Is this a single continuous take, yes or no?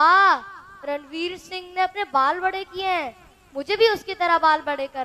yes